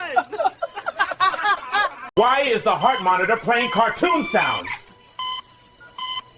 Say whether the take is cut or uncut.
cut